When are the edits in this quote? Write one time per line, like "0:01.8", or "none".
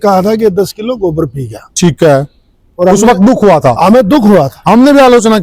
none